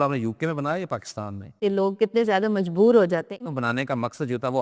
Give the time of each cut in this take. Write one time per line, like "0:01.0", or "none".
0:01.6
0:03.3